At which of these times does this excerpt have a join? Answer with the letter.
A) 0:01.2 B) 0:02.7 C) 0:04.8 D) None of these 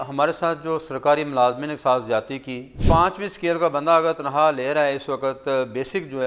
B